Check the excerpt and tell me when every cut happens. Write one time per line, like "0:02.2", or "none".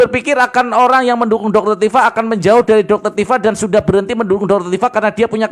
none